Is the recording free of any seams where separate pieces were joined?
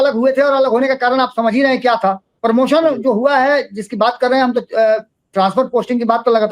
no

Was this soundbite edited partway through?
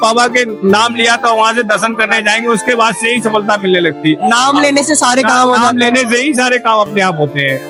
no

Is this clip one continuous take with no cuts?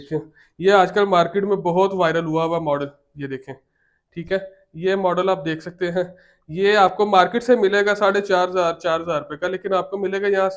yes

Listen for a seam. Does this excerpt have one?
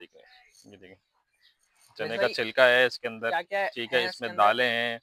no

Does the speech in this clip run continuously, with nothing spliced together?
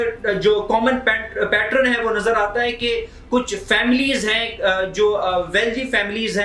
yes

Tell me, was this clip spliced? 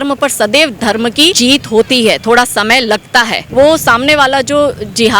yes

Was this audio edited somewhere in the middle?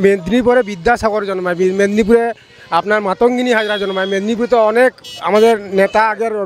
no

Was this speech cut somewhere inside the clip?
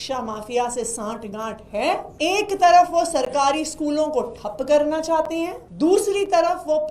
yes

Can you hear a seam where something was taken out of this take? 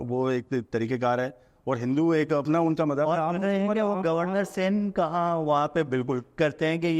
no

